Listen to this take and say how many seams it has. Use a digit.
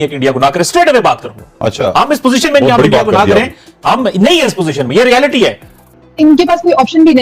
1